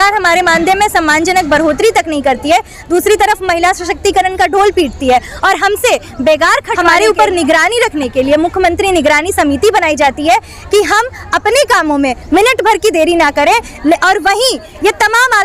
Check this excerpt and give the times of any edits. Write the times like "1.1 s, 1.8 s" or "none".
6.7 s